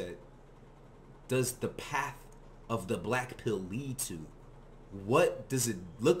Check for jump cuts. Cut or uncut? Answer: uncut